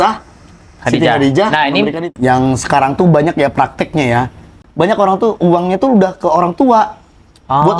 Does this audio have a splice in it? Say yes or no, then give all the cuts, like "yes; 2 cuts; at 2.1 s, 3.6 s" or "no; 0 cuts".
yes; 2 cuts; at 2.0 s, 4.5 s